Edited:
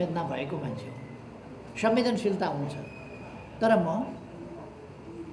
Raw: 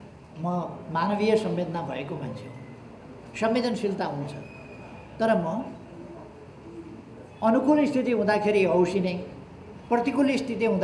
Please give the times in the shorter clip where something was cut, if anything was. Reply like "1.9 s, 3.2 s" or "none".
none